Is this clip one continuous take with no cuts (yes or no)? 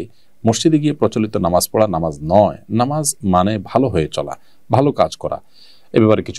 yes